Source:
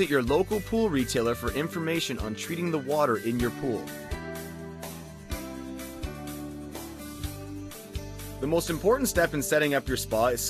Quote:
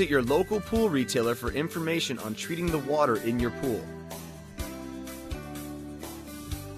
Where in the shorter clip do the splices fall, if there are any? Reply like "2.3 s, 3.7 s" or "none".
3.8 s